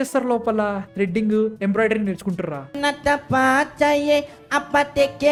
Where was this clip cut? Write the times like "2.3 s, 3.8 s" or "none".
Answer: none